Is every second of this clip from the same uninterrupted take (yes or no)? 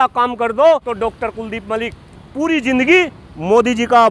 no